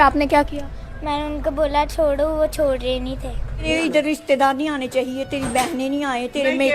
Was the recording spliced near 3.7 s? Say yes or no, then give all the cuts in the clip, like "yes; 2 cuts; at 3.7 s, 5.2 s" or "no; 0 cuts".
yes; 1 cut; at 3.7 s